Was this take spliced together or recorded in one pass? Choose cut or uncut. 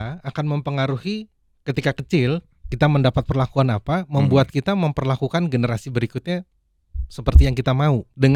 uncut